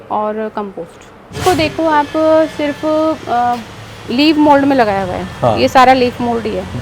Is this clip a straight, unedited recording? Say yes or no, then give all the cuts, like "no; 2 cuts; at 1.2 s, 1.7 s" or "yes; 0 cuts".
no; 1 cut; at 1.4 s